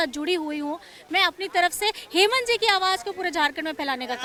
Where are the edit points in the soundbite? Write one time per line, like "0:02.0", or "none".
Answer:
none